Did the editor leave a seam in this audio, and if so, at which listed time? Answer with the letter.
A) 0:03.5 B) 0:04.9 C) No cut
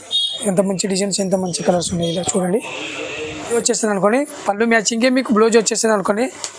A